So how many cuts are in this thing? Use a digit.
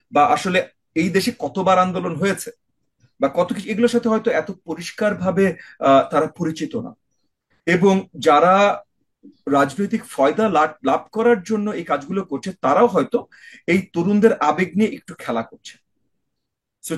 0